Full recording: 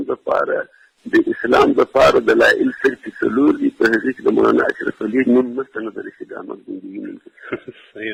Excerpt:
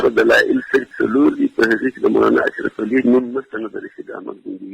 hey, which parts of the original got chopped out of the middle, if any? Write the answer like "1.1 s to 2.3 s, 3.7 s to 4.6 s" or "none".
3.0 s to 3.1 s

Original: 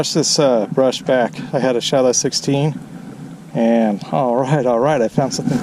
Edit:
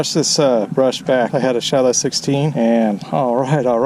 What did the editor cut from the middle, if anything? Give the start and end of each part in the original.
1.3 s to 1.5 s, 2.7 s to 3.5 s

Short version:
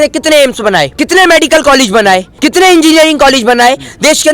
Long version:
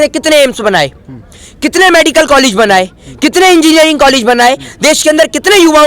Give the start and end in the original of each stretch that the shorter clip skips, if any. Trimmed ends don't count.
0.9 s to 1.6 s, 3.0 s to 3.1 s

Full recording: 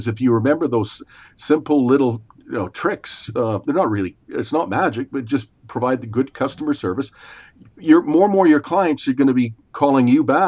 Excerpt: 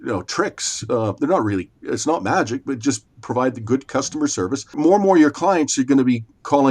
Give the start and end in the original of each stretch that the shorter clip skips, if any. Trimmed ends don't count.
7.2 s to 8.1 s

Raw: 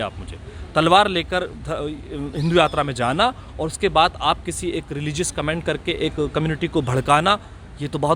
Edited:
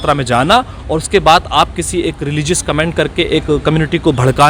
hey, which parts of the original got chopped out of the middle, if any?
none

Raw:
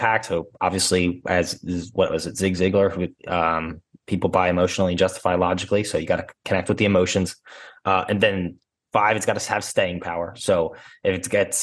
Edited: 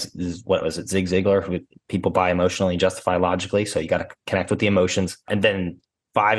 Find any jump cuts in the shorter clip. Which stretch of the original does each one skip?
3.2 s to 3.9 s, 7.4 s to 8.0 s

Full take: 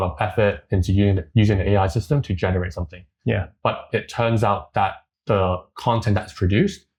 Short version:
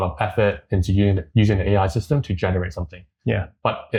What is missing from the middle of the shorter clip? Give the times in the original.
none

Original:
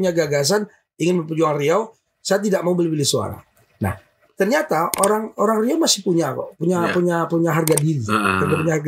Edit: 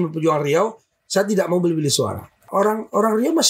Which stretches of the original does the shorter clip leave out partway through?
3.6 s to 4.9 s

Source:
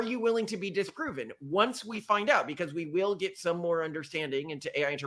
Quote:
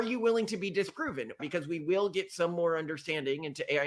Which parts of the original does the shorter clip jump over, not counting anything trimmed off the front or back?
1.4 s to 2.5 s

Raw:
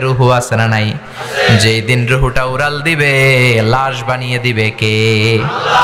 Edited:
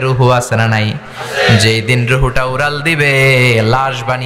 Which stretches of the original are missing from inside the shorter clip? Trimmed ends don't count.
none

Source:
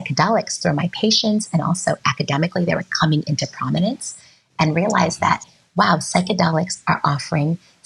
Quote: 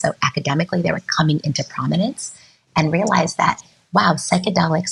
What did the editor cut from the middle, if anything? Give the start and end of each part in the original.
none

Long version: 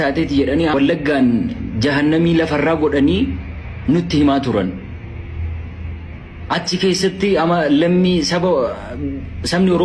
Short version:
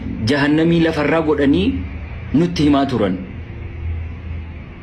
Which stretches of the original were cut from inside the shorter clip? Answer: none

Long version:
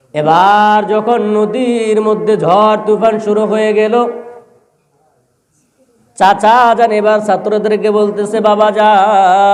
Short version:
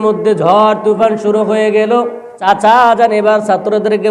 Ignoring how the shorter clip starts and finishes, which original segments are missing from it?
4.5 s to 6.3 s

